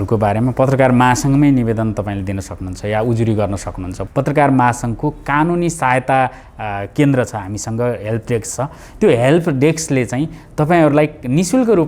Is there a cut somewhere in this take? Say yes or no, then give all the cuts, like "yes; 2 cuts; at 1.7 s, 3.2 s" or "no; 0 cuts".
yes; 1 cut; at 4.0 s